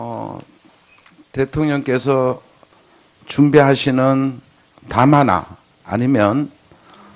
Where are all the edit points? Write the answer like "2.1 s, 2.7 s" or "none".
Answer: 3.8 s